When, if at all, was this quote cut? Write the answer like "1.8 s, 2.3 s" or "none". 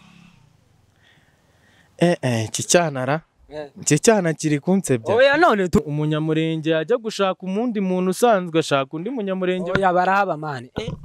5.8 s